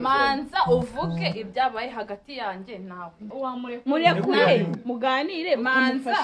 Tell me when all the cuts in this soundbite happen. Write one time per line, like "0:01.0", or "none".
0:03.3